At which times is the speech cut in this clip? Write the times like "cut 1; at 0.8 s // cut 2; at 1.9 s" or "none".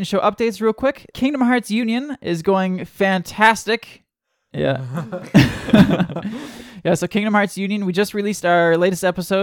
cut 1; at 1.1 s // cut 2; at 4.4 s